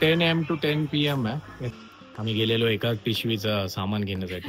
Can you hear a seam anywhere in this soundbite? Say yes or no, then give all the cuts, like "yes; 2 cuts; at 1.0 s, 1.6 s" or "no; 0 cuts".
yes; 1 cut; at 1.7 s